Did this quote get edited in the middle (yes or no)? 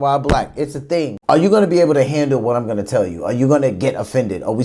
yes